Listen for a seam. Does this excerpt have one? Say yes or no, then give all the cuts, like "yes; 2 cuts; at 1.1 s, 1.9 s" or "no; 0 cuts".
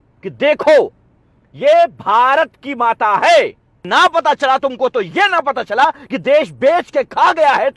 yes; 1 cut; at 3.8 s